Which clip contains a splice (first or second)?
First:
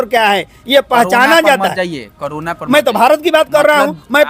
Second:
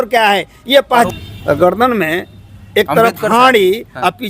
second